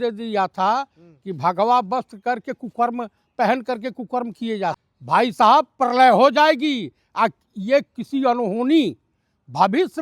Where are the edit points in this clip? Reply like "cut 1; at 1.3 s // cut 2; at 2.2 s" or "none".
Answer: cut 1; at 4.9 s